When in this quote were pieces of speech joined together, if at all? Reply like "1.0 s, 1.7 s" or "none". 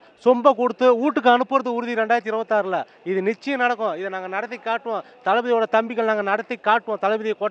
none